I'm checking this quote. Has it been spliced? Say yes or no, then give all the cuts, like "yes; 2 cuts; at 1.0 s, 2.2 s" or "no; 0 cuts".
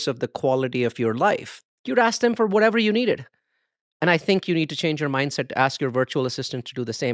yes; 1 cut; at 1.5 s